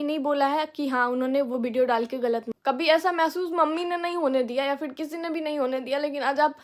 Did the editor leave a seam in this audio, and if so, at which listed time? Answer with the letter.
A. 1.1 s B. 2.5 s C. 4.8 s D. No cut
B